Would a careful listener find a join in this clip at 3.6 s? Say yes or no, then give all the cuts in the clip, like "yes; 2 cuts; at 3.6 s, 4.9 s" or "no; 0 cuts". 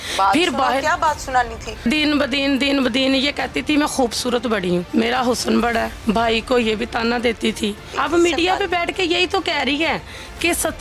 no; 4 cuts; at 1.8 s, 4.9 s, 5.9 s, 7.9 s